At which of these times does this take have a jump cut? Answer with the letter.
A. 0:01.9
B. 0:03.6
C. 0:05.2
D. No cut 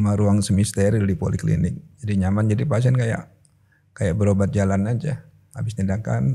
A